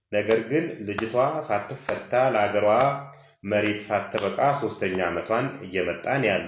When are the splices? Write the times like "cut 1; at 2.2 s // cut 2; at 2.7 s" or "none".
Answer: none